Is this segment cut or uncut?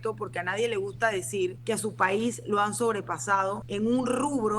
cut